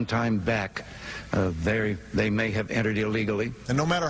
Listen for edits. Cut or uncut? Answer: uncut